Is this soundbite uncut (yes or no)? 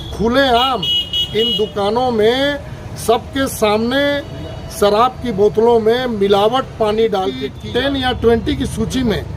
no